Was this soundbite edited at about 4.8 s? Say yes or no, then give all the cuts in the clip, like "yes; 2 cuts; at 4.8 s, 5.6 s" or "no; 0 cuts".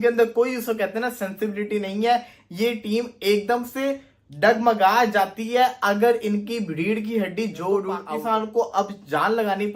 no; 1 cut; at 8.0 s